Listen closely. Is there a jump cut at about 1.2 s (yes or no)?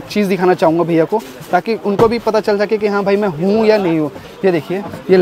no